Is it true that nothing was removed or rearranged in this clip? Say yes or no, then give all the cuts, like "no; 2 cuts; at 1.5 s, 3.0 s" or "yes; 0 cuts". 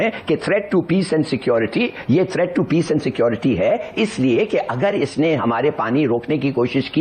yes; 0 cuts